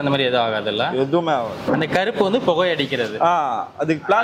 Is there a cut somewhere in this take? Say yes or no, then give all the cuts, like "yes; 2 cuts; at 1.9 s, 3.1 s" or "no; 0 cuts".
yes; 1 cut; at 1.6 s